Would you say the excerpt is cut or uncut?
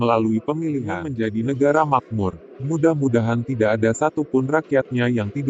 cut